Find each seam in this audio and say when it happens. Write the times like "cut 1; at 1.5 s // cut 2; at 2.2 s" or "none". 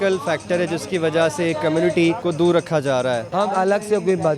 cut 1; at 2.2 s // cut 2; at 3.3 s